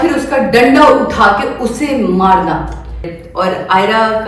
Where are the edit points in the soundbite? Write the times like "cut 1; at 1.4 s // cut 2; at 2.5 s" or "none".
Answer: cut 1; at 3.1 s